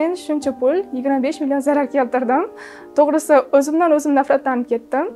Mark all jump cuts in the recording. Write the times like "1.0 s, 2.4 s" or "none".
none